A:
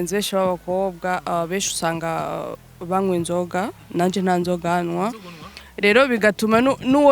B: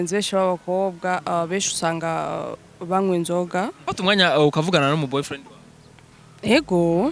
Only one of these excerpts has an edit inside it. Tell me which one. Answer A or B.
B